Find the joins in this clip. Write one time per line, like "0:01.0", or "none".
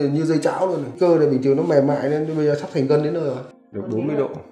0:00.9
0:03.5